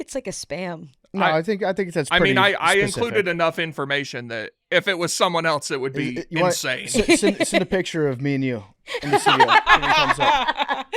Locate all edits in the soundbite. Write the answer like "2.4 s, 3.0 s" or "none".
0.9 s